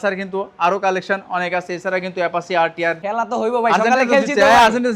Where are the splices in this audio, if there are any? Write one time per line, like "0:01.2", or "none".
0:03.0